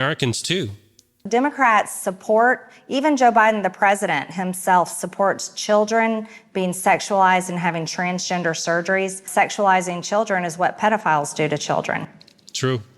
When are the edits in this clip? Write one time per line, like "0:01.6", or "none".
0:01.3